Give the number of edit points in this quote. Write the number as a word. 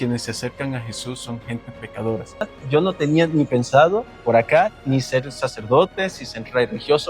one